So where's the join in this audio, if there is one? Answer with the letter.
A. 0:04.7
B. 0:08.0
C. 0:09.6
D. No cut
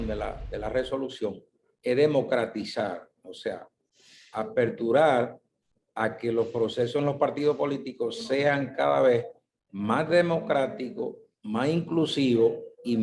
D